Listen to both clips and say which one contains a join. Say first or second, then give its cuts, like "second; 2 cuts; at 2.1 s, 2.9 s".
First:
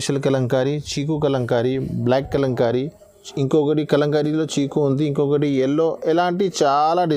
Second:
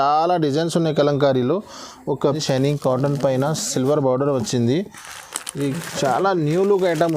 second; 1 cut; at 2.2 s